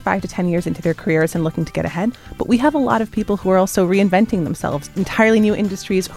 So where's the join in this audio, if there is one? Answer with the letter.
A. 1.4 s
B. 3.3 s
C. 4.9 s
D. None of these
C